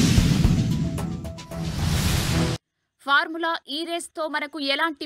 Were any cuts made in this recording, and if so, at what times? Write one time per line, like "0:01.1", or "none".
0:02.6